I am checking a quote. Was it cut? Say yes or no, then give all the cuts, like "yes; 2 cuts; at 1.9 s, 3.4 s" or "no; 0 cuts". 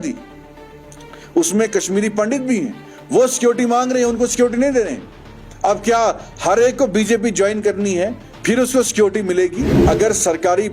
yes; 1 cut; at 9.7 s